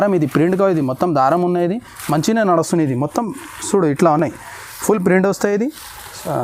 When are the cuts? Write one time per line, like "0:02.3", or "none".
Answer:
none